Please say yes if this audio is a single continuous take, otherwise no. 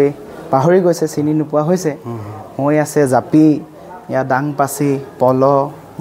yes